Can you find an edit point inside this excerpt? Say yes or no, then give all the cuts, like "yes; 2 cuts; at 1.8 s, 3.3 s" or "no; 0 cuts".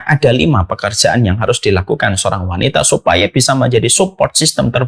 no; 0 cuts